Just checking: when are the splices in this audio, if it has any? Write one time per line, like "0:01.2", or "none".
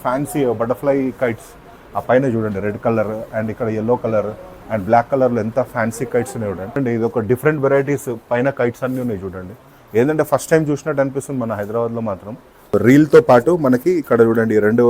0:06.8
0:12.7